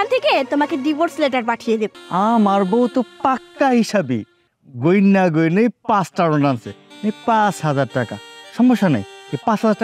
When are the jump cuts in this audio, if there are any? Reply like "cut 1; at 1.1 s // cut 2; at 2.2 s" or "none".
cut 1; at 2.0 s